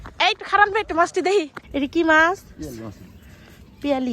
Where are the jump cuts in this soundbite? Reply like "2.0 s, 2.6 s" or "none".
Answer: 1.6 s